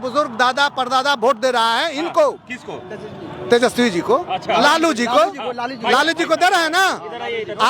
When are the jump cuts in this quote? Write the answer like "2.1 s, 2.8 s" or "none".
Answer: none